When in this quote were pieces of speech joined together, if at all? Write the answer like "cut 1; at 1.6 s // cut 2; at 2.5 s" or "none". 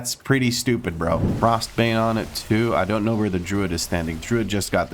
cut 1; at 1.3 s